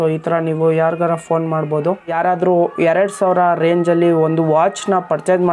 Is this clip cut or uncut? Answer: cut